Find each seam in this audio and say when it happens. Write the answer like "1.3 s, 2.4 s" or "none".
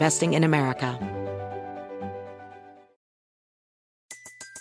0.9 s